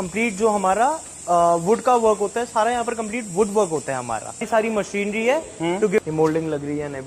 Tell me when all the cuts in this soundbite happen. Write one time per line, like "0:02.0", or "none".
0:04.5
0:06.0